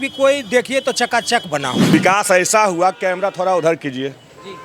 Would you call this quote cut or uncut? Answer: cut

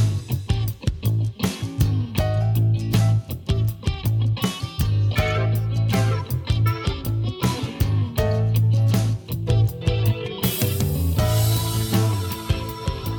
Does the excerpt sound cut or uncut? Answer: uncut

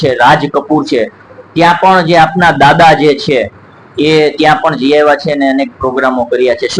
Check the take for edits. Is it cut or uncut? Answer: uncut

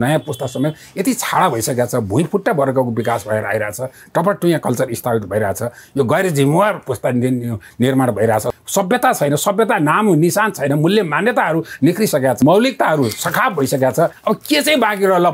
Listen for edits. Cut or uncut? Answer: cut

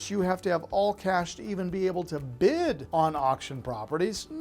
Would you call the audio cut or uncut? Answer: cut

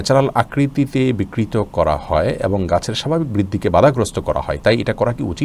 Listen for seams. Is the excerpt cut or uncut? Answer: uncut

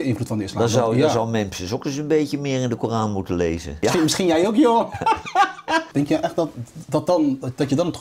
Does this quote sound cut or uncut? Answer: cut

